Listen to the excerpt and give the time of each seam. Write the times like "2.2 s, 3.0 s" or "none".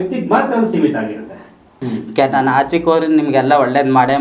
1.8 s